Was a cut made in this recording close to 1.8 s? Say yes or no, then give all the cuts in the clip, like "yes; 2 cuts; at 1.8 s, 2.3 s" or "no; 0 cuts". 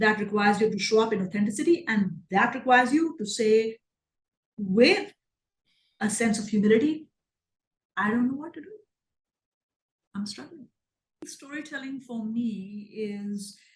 no; 1 cut; at 11.3 s